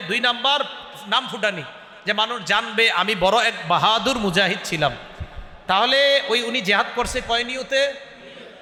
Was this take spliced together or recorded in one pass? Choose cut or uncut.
uncut